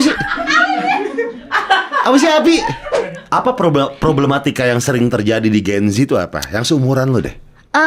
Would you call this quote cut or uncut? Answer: cut